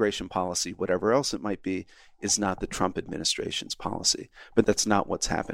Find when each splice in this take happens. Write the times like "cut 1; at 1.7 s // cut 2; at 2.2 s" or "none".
cut 1; at 4.6 s